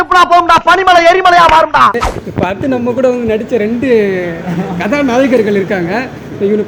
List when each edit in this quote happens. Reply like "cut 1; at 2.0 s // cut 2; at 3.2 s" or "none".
cut 1; at 1.9 s